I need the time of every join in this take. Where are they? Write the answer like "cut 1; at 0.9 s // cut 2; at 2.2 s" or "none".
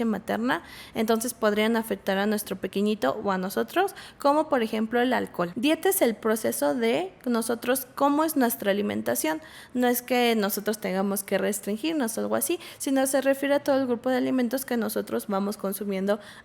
cut 1; at 5.4 s